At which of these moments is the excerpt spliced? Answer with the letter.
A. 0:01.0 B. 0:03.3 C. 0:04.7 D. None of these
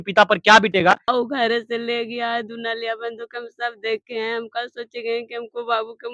A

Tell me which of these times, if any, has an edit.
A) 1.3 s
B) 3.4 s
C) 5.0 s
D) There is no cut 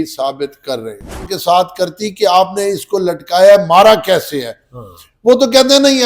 A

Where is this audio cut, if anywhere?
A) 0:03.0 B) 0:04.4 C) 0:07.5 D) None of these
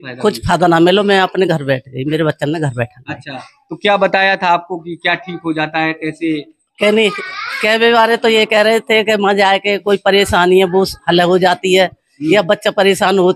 D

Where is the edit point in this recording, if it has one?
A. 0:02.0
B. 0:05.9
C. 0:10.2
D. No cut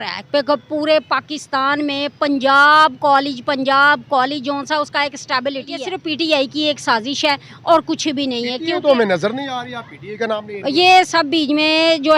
B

